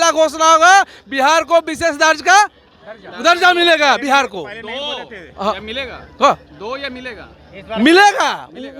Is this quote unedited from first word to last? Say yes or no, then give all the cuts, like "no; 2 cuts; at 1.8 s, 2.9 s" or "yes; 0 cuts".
yes; 0 cuts